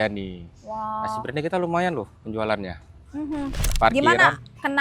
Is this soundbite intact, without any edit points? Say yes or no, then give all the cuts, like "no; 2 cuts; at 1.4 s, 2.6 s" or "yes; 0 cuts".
no; 1 cut; at 3.7 s